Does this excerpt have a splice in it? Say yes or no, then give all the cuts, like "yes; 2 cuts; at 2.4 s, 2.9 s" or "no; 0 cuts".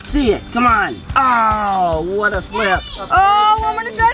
yes; 2 cuts; at 1.0 s, 3.1 s